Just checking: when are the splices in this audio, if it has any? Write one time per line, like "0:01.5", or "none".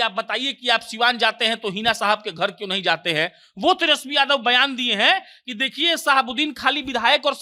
none